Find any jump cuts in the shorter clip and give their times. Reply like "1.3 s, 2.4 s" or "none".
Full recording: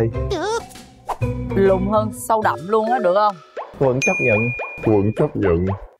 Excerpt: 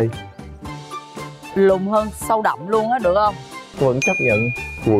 none